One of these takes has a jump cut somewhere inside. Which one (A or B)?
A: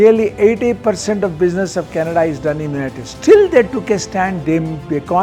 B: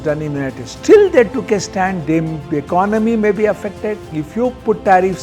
B